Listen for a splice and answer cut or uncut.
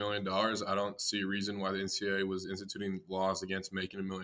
uncut